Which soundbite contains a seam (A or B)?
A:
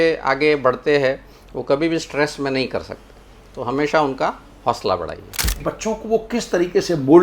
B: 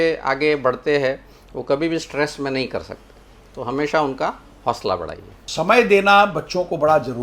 A